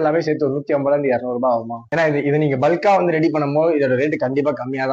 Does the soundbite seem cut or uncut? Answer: uncut